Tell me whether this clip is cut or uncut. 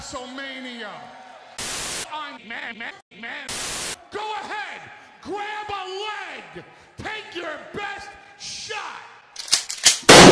cut